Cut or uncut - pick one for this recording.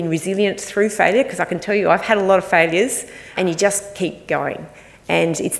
cut